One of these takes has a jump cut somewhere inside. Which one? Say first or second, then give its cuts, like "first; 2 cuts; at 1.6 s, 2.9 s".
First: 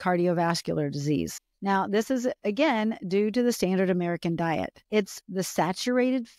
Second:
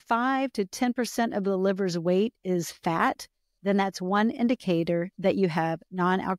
first; 2 cuts; at 1.4 s, 4.8 s